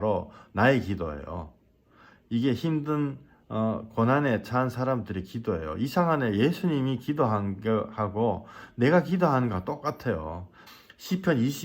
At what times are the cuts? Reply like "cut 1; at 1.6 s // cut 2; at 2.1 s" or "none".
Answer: cut 1; at 10.6 s